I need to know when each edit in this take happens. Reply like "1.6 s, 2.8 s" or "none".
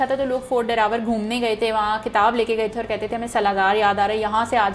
none